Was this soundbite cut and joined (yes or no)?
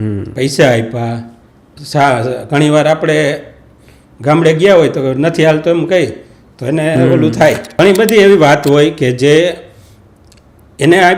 yes